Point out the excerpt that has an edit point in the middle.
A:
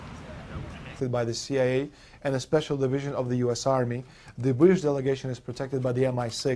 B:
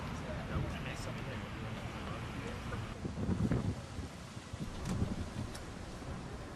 B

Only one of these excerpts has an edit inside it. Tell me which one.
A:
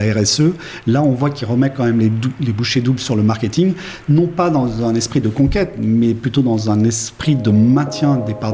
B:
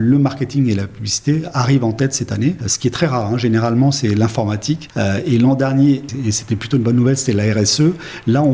B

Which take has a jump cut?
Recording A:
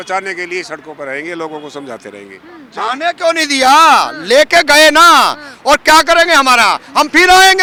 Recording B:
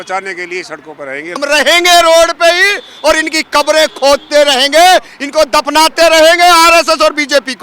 B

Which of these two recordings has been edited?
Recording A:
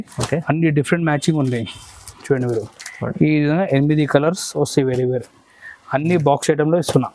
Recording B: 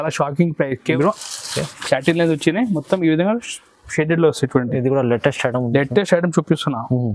B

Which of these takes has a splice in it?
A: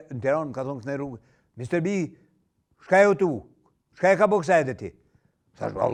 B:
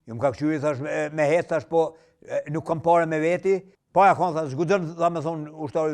B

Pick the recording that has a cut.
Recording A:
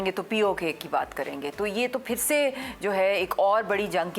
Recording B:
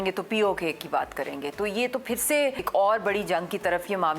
B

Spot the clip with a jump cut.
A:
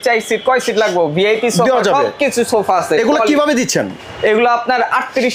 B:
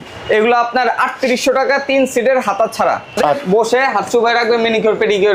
B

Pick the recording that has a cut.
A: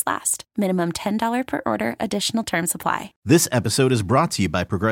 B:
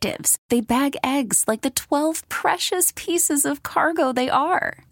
A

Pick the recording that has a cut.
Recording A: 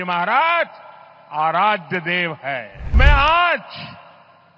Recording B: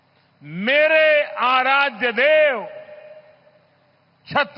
A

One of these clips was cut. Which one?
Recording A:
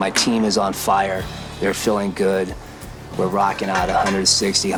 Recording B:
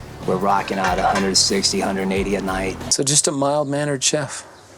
B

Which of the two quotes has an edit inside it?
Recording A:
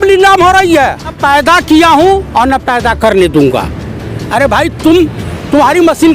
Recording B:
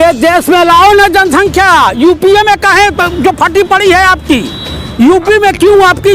A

